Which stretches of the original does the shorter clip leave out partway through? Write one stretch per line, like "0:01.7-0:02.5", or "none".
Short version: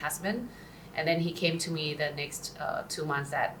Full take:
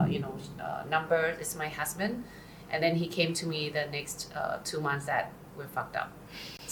none